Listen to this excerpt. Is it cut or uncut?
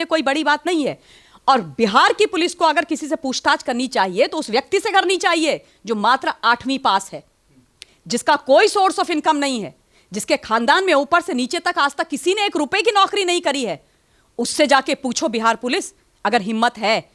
uncut